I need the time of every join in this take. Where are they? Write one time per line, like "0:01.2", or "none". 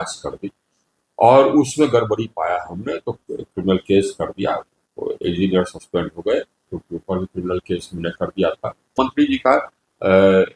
0:06.8
0:08.9